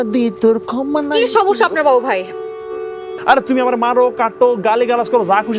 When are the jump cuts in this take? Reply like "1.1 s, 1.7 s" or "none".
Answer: 3.0 s